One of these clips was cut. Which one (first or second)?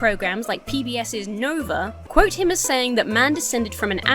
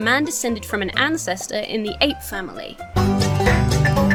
first